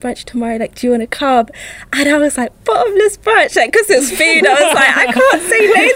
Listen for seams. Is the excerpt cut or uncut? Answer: uncut